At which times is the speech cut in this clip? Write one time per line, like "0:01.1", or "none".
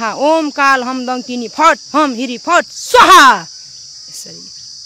none